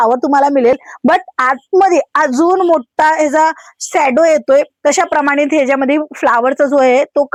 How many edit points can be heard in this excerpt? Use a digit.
0